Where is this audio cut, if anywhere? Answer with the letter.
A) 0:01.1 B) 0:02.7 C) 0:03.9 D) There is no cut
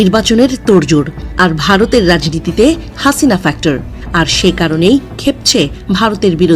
C